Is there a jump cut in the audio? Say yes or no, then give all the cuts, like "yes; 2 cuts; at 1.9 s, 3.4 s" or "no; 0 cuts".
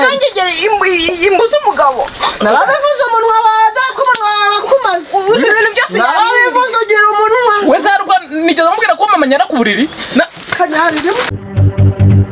yes; 1 cut; at 11.4 s